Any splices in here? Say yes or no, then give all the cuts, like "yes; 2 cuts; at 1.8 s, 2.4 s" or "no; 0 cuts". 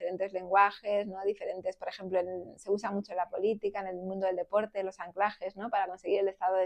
no; 0 cuts